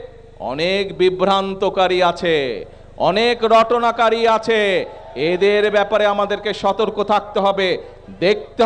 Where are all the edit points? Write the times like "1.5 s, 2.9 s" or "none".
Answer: none